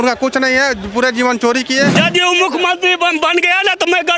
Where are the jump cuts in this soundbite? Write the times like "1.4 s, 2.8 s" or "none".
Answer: 1.9 s